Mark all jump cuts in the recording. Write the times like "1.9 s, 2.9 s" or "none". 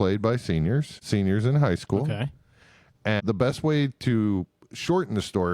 1.0 s, 3.2 s